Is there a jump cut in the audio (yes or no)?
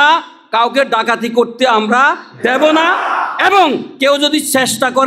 no